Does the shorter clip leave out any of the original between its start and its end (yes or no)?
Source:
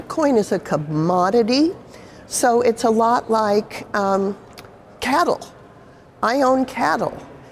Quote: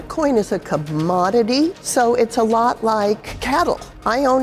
yes